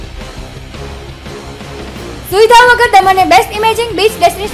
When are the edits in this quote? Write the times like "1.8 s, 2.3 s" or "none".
2.2 s